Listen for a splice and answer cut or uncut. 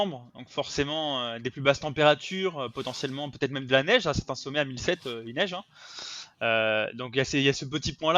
uncut